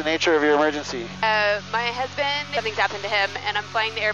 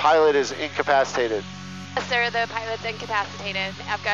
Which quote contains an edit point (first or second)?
first